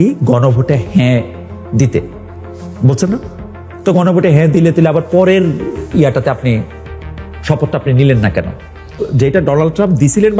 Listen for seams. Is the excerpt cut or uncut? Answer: cut